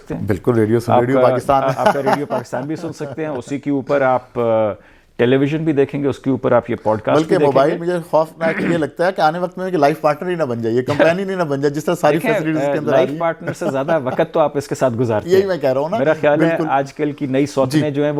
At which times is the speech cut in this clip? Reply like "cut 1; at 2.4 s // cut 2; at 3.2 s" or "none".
none